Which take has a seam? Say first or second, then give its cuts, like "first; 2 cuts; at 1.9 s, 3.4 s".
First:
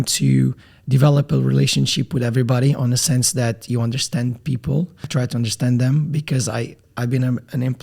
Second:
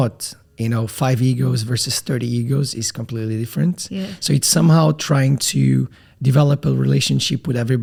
first; 2 cuts; at 5.1 s, 6.8 s